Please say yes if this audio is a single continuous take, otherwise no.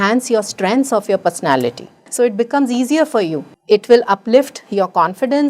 no